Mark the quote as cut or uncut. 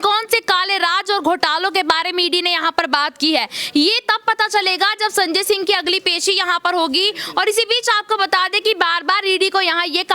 uncut